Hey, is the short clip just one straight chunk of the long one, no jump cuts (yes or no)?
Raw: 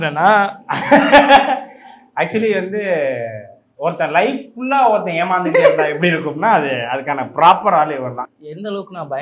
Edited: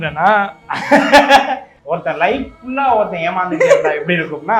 no